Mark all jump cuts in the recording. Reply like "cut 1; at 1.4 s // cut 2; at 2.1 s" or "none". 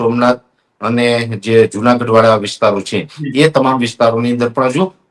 none